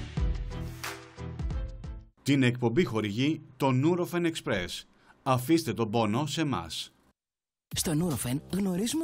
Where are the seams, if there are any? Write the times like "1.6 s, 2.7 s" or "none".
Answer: 1.0 s, 1.8 s